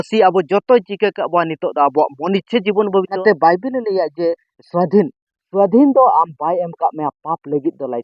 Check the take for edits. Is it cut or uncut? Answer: cut